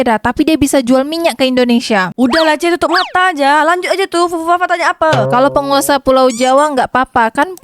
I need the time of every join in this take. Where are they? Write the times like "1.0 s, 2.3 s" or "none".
5.3 s